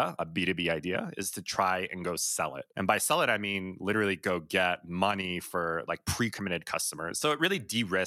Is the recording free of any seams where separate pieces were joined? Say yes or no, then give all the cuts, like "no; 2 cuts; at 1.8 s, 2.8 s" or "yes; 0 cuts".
no; 1 cut; at 7.1 s